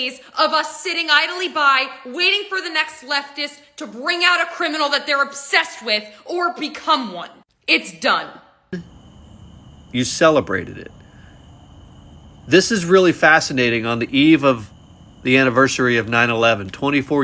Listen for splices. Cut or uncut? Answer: cut